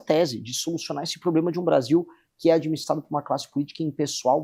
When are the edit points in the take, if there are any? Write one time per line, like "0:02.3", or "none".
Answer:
none